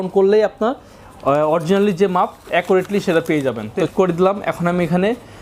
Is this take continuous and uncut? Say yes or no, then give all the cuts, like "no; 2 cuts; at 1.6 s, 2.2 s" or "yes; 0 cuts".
no; 1 cut; at 3.8 s